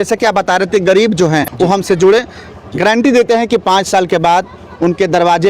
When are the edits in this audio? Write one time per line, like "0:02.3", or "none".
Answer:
0:01.5